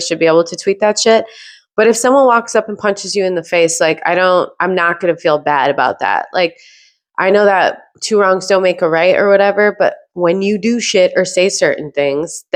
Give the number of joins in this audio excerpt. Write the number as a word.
zero